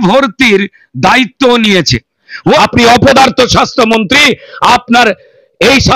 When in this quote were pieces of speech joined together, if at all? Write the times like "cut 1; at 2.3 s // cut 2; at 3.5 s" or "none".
cut 1; at 2.6 s